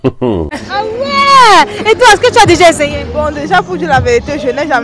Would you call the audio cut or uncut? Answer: uncut